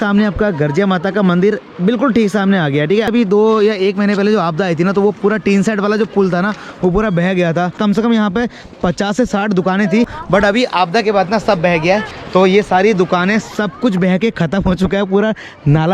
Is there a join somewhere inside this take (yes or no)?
yes